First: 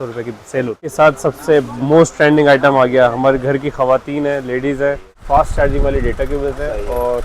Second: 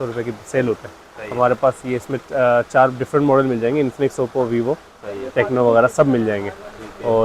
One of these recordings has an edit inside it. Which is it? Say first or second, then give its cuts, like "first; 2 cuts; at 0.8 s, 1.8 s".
first; 2 cuts; at 0.9 s, 5.2 s